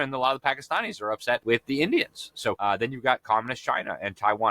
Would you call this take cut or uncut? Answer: cut